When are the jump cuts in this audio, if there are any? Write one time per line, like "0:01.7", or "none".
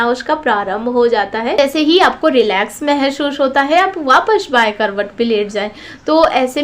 0:01.6